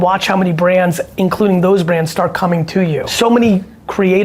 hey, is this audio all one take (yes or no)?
no